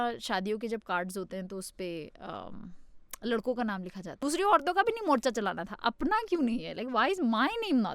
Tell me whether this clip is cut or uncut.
cut